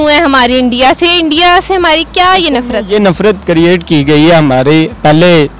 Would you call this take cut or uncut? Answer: uncut